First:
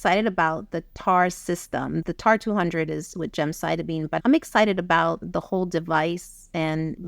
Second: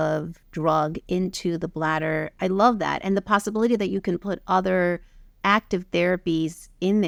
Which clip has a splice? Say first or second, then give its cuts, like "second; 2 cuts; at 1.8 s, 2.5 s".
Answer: first; 5 cuts; at 0.9 s, 2.0 s, 3.1 s, 4.2 s, 5.2 s